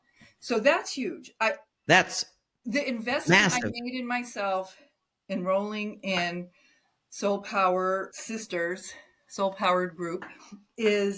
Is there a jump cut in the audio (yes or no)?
no